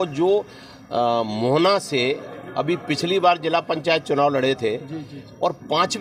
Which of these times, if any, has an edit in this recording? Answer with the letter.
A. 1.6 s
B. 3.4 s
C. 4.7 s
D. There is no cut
D